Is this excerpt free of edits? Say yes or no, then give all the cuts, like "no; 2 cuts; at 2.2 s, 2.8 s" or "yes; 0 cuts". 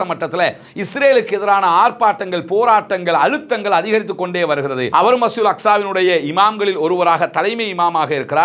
no; 1 cut; at 4.9 s